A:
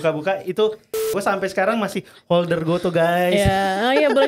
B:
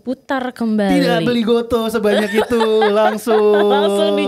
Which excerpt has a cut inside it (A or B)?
A